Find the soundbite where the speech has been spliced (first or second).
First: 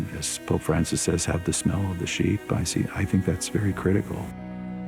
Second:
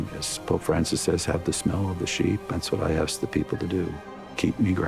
second